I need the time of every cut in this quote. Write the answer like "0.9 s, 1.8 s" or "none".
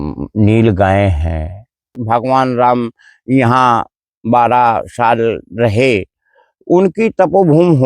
2.0 s

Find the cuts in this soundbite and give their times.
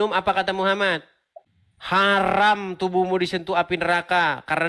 2.0 s

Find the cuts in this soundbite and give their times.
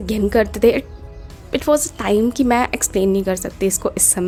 none

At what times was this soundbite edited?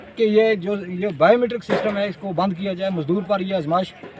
none

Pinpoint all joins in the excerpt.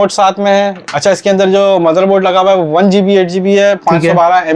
none

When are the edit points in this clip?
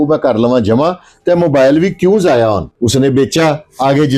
2.7 s

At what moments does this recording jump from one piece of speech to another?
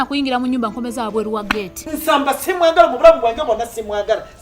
1.8 s

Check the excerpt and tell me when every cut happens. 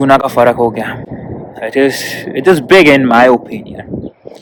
none

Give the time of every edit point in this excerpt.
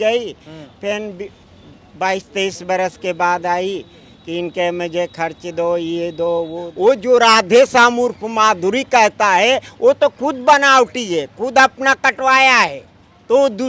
6.7 s

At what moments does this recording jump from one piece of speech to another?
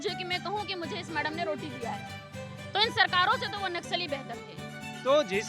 4.4 s

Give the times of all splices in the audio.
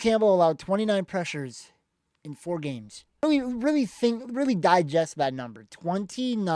3.2 s

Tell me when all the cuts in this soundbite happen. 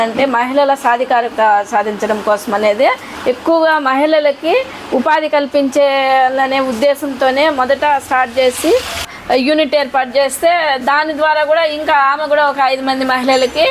1.3 s, 3.1 s, 9.1 s

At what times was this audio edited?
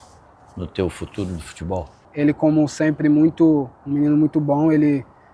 2.0 s

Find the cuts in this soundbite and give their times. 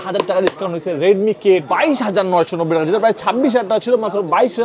1.7 s

